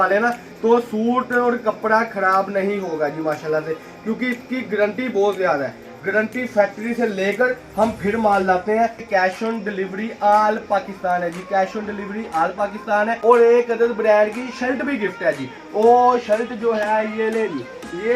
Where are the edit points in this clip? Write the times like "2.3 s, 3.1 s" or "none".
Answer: 9.0 s, 13.2 s